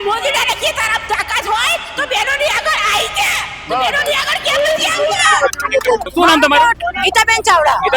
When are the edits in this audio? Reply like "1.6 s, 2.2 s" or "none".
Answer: 6.1 s